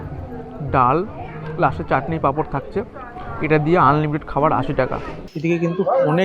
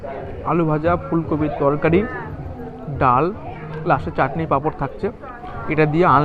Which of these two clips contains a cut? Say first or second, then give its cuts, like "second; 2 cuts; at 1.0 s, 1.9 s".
first; 1 cut; at 5.3 s